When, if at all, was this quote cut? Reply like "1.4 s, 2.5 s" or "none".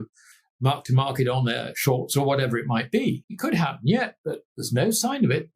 3.3 s